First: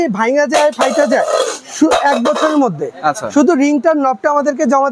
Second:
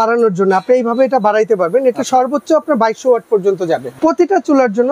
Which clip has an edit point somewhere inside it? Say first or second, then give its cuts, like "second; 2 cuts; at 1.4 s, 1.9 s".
second; 1 cut; at 3.9 s